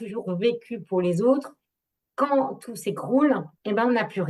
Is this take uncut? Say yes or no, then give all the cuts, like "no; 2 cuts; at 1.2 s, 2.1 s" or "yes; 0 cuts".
yes; 0 cuts